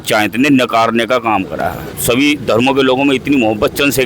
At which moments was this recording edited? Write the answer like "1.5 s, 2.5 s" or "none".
2.0 s